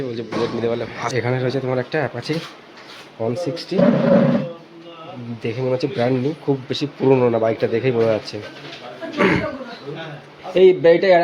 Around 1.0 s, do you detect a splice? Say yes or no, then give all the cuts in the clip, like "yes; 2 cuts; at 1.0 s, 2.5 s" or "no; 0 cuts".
yes; 1 cut; at 1.0 s